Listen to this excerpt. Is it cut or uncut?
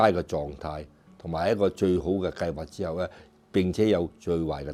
uncut